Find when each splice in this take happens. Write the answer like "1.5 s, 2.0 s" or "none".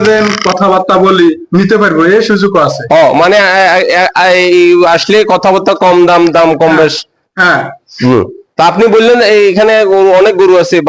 none